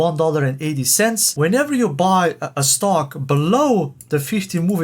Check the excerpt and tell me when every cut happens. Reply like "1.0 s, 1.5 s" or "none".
1.3 s